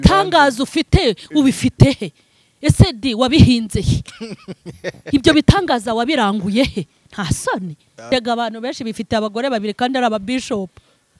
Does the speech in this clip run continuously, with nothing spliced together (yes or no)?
no